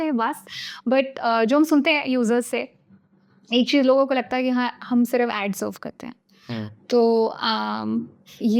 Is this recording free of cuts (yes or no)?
yes